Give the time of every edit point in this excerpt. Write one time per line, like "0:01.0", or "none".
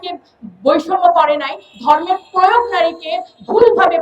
none